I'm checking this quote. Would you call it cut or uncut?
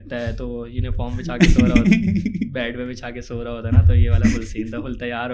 uncut